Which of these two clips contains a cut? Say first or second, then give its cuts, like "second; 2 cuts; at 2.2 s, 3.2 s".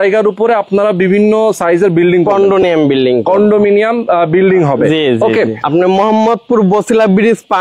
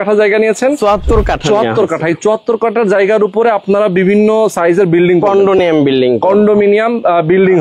first; 1 cut; at 5.6 s